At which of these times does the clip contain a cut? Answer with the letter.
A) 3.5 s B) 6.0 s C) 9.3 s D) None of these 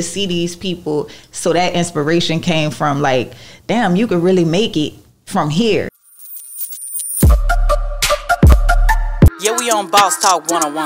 B